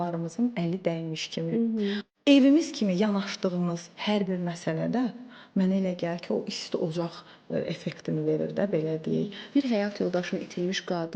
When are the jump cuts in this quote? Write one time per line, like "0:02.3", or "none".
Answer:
0:02.0
0:09.4